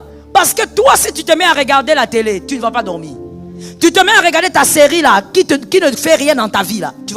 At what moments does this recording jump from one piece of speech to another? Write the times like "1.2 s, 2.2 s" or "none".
none